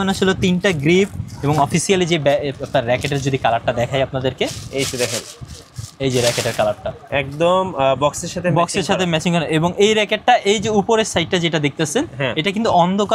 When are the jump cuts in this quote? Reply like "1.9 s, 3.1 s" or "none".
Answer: none